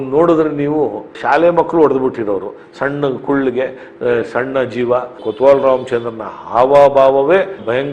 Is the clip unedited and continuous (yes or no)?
no